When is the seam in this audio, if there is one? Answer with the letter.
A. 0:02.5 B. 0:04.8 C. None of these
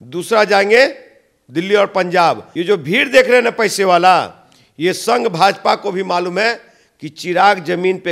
A